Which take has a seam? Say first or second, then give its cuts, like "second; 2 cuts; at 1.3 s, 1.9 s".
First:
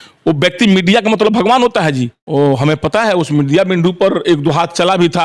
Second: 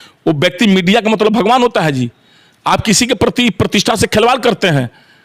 first; 1 cut; at 2.2 s